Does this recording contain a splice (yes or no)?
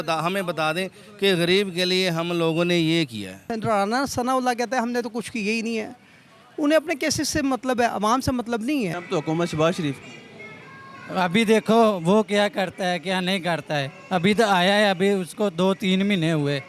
yes